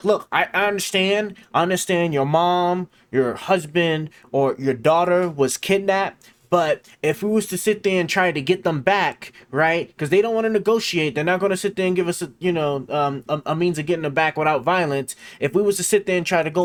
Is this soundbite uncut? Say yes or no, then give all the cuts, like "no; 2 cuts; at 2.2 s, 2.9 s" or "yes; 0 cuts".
yes; 0 cuts